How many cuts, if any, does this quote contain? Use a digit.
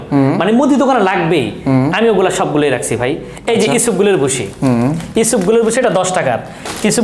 0